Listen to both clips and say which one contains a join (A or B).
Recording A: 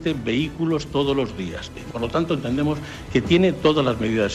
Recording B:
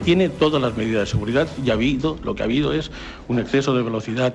A